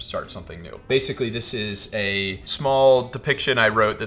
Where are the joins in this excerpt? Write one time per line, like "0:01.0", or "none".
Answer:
0:00.9
0:02.4